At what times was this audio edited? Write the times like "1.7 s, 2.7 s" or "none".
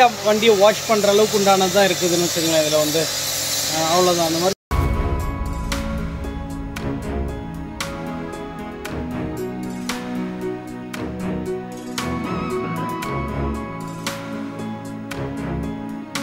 none